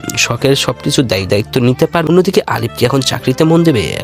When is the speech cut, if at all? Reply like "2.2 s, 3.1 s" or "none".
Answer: 2.0 s